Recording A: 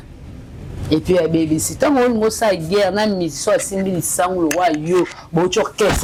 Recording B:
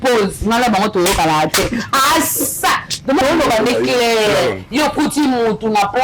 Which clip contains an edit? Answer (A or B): B